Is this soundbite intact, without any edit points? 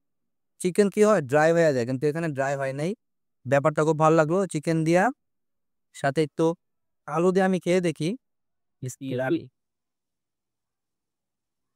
yes; 0 cuts

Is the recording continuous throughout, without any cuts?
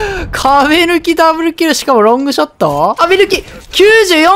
no; 1 cut; at 3.0 s

